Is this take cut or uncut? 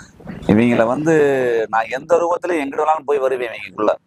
uncut